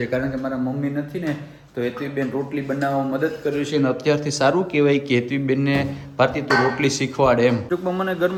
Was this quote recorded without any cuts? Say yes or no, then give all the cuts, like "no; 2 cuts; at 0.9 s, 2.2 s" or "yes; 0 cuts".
yes; 0 cuts